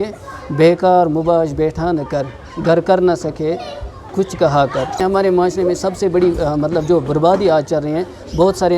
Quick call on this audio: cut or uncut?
cut